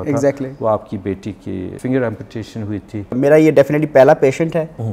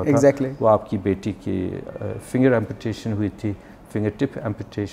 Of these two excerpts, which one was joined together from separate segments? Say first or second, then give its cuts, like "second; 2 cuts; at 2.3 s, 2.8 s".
first; 2 cuts; at 1.7 s, 3.2 s